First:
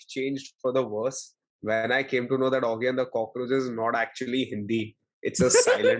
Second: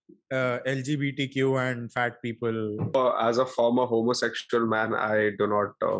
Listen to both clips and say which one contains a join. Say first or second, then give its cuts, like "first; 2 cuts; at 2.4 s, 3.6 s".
second; 1 cut; at 2.9 s